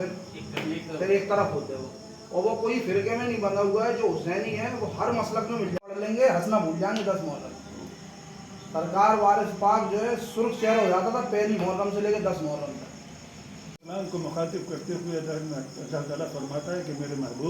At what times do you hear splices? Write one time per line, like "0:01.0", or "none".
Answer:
0:05.9
0:13.9